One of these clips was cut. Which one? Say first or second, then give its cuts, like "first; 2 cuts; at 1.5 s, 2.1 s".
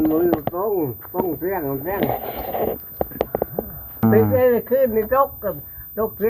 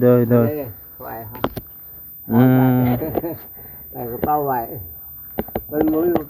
first; 1 cut; at 4.0 s